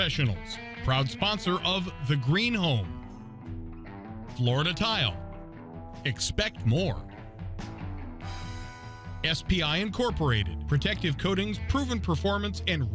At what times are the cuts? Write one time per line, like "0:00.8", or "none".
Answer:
none